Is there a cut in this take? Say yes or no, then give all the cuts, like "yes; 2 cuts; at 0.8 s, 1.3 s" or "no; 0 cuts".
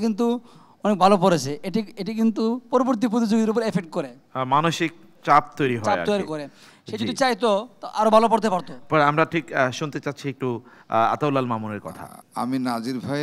no; 0 cuts